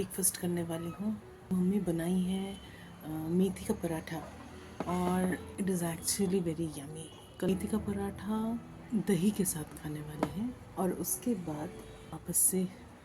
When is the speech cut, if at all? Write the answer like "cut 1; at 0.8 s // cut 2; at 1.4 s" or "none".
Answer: cut 1; at 1.5 s // cut 2; at 5.5 s // cut 3; at 7.5 s // cut 4; at 8.7 s // cut 5; at 10.6 s // cut 6; at 12.2 s